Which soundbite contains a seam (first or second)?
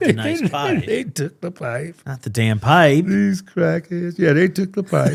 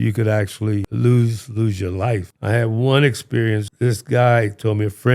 second